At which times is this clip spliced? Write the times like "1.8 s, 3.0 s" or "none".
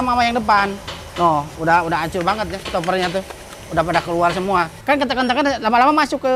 4.7 s